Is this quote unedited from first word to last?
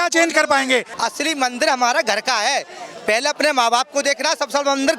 no; 1 cut; at 0.9 s

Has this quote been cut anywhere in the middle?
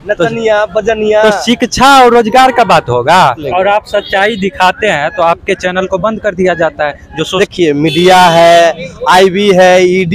yes; 2 cuts; at 3.5 s, 7.4 s

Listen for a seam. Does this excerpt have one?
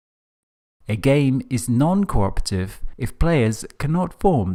no; 0 cuts

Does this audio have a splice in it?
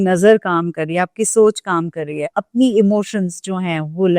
yes; 1 cut; at 2.4 s

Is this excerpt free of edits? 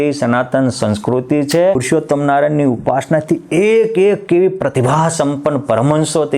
no; 1 cut; at 1.8 s

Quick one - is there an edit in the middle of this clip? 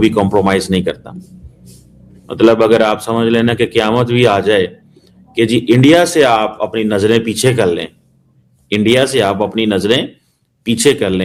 no; 0 cuts

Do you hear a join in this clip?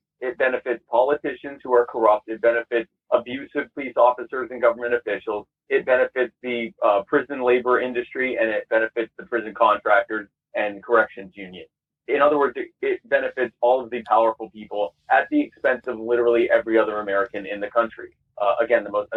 no; 0 cuts

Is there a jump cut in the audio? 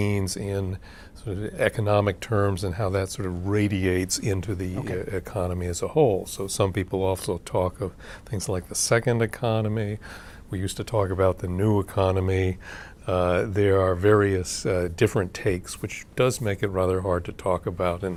no; 0 cuts

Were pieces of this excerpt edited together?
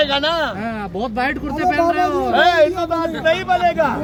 no; 0 cuts

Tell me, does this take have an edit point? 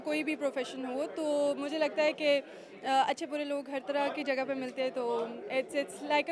no; 0 cuts

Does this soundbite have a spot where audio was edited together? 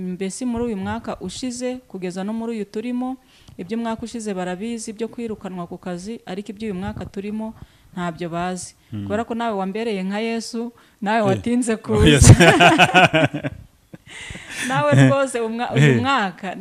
no; 0 cuts

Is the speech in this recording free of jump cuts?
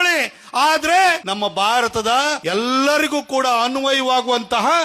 no; 2 cuts; at 1.3 s, 2.4 s

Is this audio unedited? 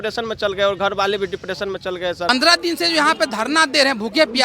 no; 1 cut; at 2.3 s

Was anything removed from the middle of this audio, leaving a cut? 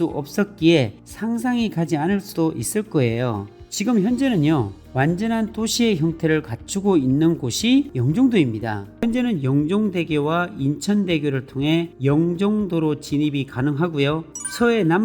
yes; 1 cut; at 9.0 s

